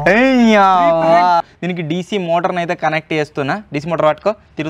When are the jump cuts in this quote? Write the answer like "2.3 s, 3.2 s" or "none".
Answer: 1.4 s